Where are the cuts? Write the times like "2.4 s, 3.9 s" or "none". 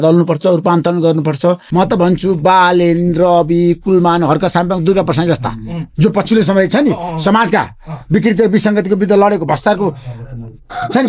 1.6 s